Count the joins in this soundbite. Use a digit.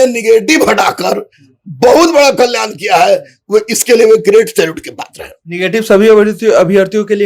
0